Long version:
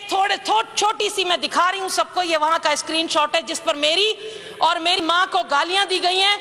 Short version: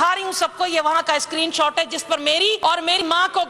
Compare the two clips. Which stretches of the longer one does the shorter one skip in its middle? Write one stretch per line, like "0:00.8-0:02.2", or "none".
0:04.1-0:04.6